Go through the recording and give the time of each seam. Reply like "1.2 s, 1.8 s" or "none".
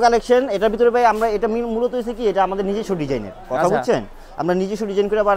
none